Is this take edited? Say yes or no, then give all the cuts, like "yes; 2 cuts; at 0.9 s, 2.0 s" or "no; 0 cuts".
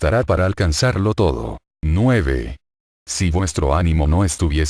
no; 0 cuts